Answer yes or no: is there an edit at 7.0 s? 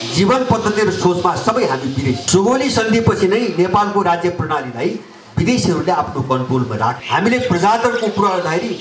yes